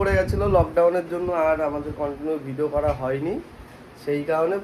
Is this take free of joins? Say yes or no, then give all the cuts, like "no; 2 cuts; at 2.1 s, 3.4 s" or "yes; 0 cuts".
yes; 0 cuts